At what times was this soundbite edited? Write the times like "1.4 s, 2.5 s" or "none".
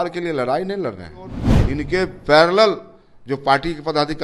1.5 s